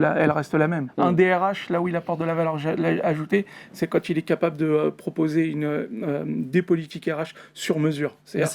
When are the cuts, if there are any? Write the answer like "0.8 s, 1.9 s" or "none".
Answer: 0.9 s